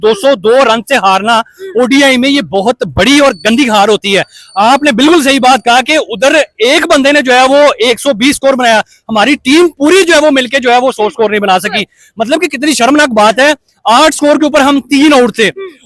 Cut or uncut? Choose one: uncut